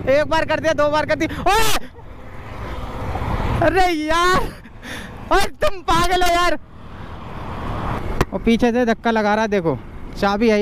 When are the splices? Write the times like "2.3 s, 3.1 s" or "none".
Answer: 3.0 s, 7.9 s